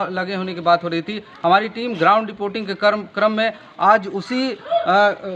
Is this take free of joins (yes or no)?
yes